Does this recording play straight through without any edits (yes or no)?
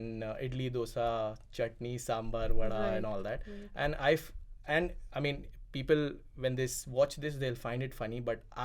yes